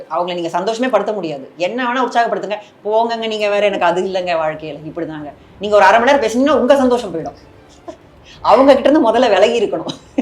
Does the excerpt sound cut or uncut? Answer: uncut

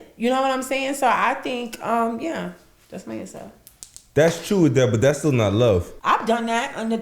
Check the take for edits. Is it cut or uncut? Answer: cut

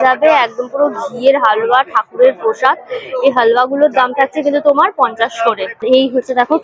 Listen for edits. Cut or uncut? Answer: uncut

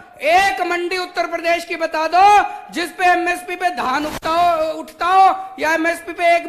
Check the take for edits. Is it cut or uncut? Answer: uncut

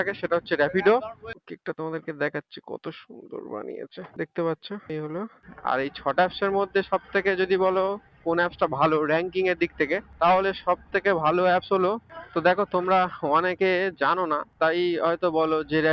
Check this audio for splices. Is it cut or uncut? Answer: cut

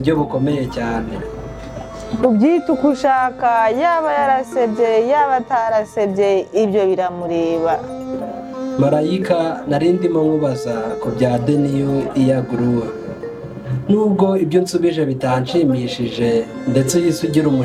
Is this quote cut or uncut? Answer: uncut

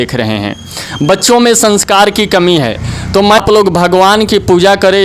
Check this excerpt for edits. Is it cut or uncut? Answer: cut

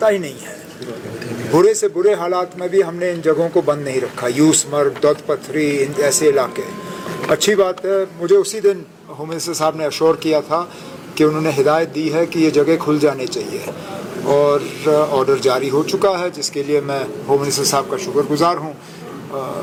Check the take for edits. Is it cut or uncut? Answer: uncut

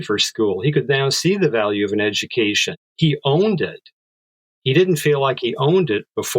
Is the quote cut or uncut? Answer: cut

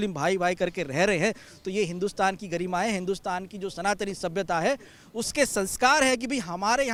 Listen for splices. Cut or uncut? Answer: uncut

